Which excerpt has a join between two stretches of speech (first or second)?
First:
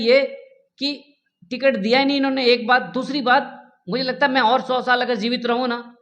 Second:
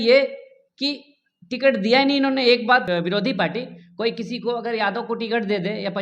second